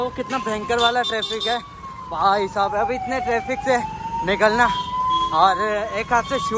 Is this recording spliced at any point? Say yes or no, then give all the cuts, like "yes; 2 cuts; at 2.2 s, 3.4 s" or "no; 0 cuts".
no; 0 cuts